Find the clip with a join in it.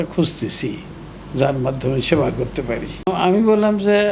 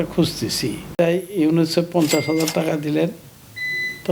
second; 1 cut; at 0.9 s

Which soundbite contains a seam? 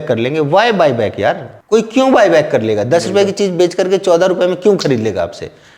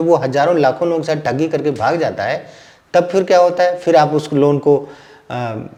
first; 1 cut; at 1.5 s

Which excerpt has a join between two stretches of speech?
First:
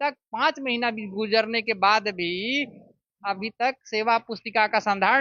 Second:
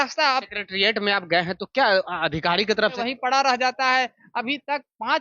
second; 1 cut; at 3.0 s

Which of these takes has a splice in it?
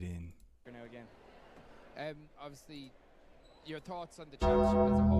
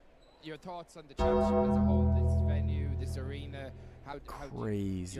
second; 1 cut; at 4.1 s

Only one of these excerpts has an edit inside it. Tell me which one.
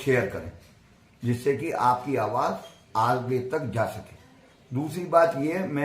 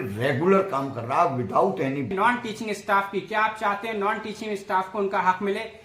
second; 1 cut; at 2.1 s

